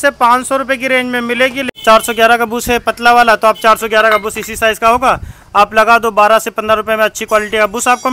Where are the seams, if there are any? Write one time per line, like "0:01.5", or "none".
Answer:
0:01.7